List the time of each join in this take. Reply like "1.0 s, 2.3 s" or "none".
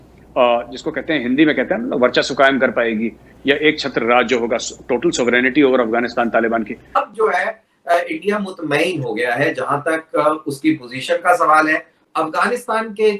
6.8 s, 12.0 s

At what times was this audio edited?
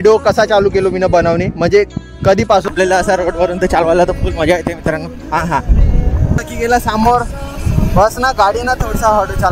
2.6 s, 6.5 s

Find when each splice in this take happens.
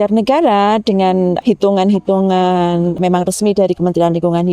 1.4 s, 3.0 s

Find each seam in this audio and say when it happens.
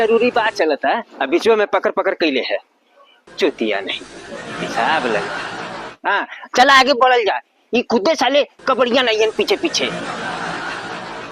6.0 s

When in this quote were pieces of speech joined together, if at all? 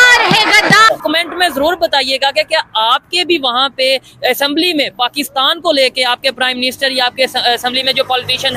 1.0 s

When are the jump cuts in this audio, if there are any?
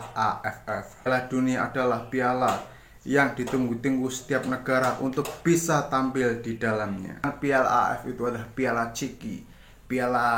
1.1 s, 7.2 s

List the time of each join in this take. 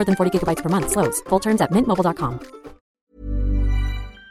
3.0 s

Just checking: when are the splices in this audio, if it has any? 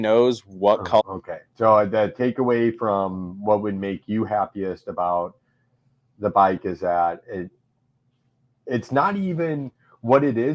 1.0 s

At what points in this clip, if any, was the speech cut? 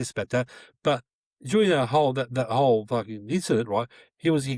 none

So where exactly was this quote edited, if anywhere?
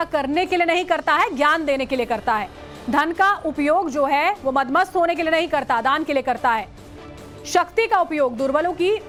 none

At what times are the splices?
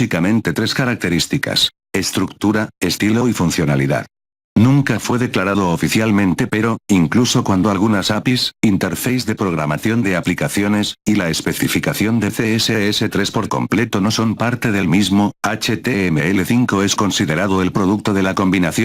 5.1 s

